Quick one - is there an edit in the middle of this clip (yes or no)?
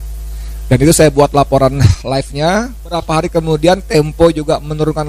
yes